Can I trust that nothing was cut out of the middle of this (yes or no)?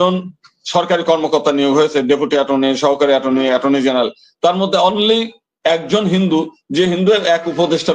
yes